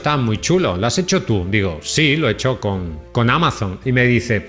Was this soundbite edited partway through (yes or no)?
no